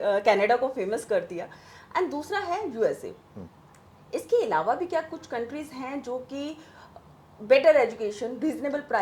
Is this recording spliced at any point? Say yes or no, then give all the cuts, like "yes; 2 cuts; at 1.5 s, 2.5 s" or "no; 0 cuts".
no; 0 cuts